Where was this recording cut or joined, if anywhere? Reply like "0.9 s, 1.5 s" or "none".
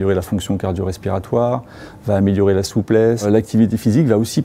3.2 s

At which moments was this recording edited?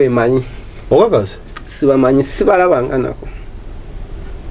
none

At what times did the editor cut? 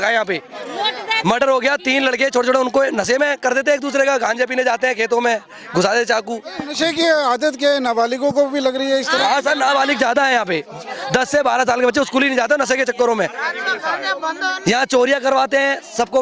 none

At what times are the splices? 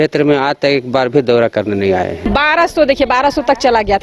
2.2 s

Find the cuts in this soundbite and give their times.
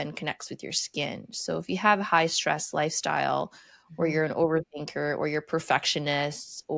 none

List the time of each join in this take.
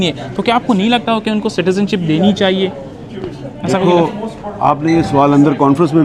none

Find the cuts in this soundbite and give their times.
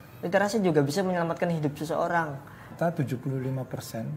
2.7 s

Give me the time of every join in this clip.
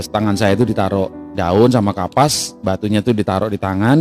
2.5 s

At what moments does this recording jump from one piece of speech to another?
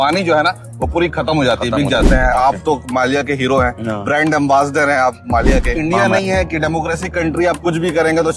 2.1 s, 5.7 s

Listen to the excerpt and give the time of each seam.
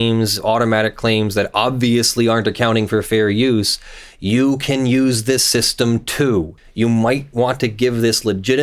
6.6 s

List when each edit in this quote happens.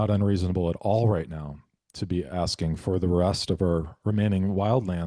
none

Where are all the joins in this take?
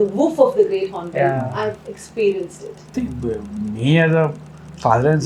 2.9 s

